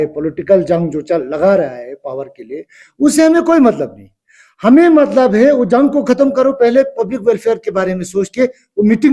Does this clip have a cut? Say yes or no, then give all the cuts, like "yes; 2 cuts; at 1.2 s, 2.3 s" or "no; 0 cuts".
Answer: no; 0 cuts